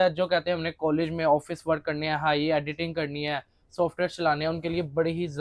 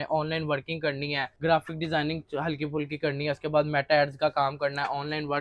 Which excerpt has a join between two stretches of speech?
second; 1 cut; at 1.3 s

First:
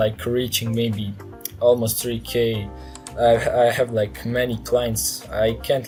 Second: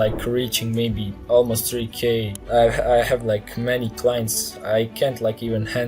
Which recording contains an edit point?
second; 2 cuts; at 1.1 s, 2.3 s

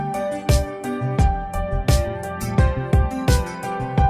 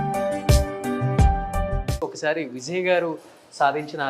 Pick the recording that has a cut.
second; 1 cut; at 1.8 s

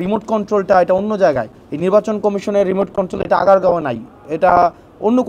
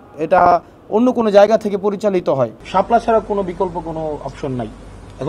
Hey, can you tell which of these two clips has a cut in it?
second; 1 cut; at 2.6 s

